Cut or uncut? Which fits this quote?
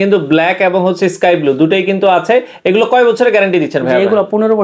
uncut